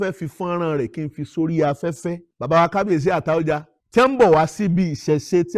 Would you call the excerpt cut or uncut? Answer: cut